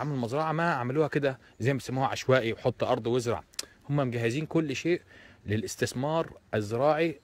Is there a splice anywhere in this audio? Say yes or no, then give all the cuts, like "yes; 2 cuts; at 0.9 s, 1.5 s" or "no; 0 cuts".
no; 0 cuts